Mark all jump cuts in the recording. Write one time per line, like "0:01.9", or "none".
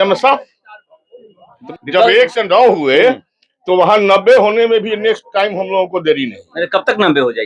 0:01.6